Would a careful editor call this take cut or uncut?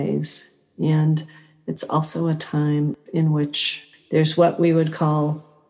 cut